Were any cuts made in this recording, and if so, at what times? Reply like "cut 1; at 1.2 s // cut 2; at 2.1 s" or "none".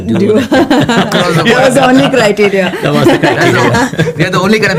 none